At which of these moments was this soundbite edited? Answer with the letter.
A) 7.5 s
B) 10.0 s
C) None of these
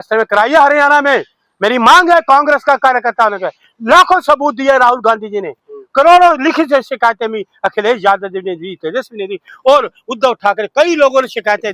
C